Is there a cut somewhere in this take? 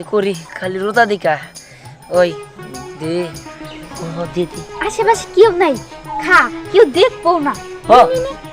yes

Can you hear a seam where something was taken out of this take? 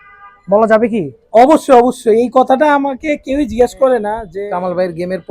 yes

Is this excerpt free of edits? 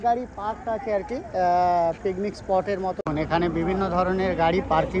no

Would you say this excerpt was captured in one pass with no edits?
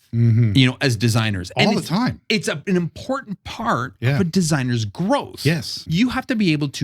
no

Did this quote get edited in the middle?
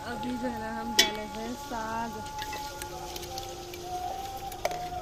no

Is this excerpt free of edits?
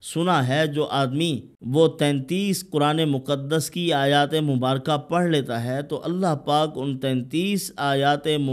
no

